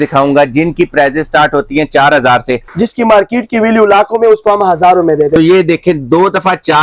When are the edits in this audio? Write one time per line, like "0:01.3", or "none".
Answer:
0:02.6
0:05.4